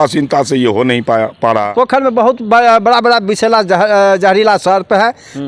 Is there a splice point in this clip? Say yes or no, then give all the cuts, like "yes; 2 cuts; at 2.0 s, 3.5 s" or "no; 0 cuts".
yes; 1 cut; at 1.7 s